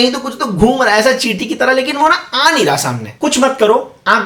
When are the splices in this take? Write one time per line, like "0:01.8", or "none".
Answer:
0:03.1